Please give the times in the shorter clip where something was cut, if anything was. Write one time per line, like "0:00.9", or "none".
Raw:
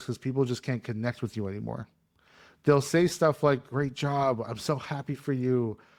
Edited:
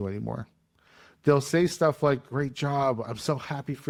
none